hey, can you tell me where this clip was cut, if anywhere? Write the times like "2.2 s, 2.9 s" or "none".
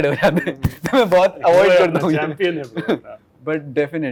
none